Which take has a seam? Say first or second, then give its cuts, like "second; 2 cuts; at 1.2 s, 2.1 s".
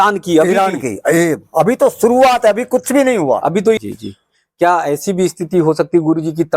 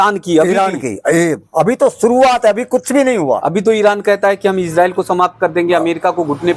first; 1 cut; at 3.8 s